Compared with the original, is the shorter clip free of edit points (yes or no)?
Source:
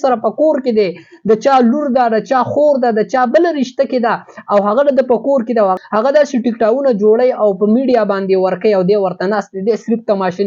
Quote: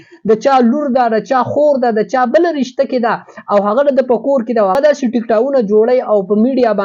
no